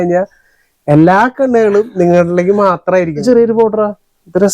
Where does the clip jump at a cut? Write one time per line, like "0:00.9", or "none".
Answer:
0:03.2